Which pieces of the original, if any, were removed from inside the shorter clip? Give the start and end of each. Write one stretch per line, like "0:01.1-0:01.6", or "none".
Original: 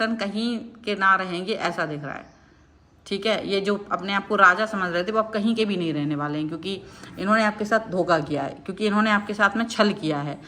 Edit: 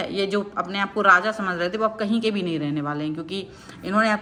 none